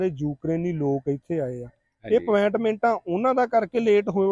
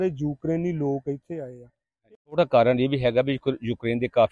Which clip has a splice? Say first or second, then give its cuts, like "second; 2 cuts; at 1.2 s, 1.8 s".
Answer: second; 1 cut; at 2.1 s